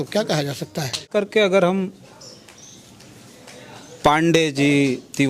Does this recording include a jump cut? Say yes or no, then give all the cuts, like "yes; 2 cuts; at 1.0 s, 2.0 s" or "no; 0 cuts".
yes; 1 cut; at 1.1 s